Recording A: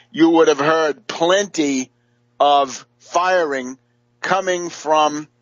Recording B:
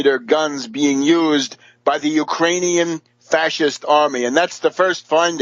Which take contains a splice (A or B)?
B